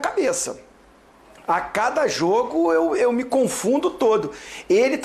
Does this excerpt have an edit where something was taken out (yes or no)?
no